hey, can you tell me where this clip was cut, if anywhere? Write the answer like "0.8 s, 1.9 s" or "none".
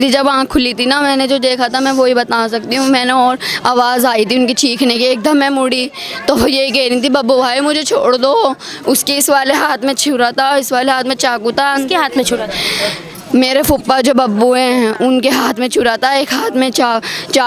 none